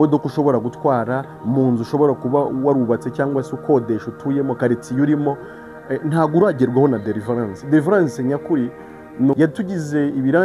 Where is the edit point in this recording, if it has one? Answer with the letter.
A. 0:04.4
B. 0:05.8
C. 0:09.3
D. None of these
C